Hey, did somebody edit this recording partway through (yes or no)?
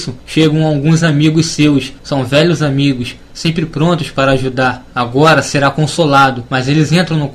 no